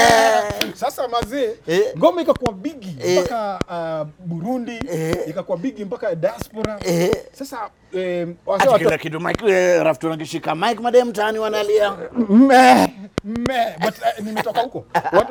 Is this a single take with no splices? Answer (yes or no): yes